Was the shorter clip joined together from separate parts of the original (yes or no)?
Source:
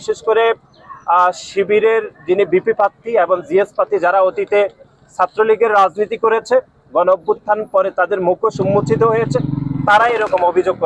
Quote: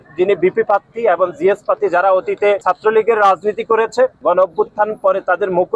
yes